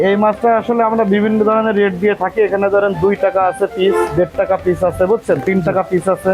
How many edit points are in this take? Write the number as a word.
zero